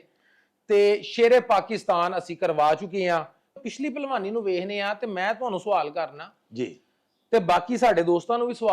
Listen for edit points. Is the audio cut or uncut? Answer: cut